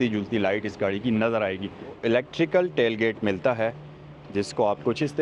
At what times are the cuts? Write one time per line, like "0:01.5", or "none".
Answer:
0:02.0

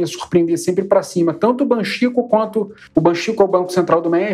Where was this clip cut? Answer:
0:02.8

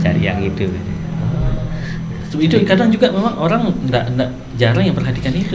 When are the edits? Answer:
none

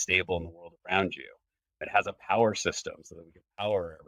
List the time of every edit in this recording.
0:01.8

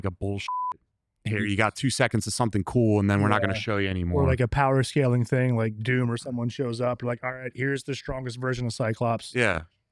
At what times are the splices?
none

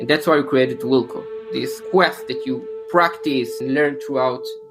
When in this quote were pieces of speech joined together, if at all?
0:01.8
0:03.6

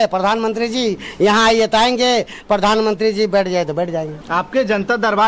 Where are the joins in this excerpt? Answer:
0:04.2

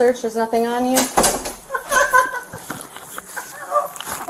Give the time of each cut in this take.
none

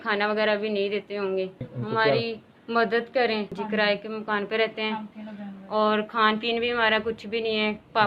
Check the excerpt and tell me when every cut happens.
0:01.7
0:03.6

